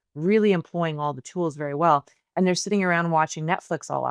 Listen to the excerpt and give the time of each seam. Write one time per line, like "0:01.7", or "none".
none